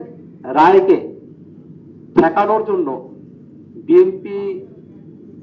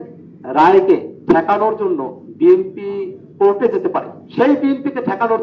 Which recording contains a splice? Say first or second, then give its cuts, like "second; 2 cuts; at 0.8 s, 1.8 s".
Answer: second; 4 cuts; at 1.1 s, 2.2 s, 3.2 s, 4.2 s